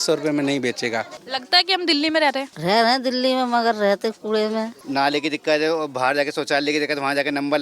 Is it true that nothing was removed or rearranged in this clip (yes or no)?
no